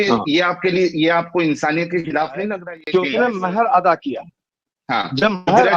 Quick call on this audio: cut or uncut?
cut